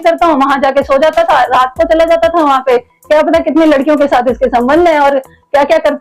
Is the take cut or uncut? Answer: uncut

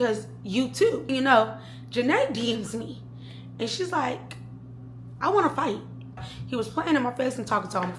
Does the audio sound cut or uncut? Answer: cut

